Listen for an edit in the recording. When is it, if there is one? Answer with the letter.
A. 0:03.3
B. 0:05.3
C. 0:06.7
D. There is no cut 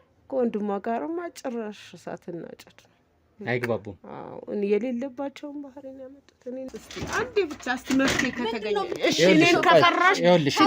C